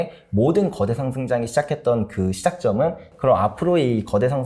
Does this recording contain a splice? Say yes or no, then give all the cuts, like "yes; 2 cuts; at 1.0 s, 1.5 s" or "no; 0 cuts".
yes; 1 cut; at 3.1 s